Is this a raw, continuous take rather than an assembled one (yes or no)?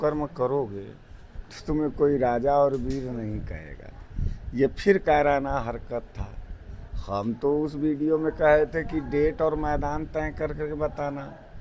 yes